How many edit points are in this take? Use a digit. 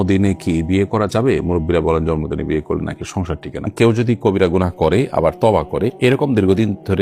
1